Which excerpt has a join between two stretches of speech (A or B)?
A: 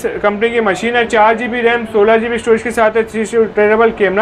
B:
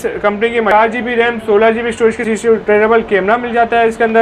B